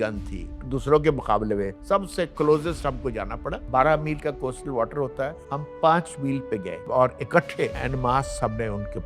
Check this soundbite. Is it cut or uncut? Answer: cut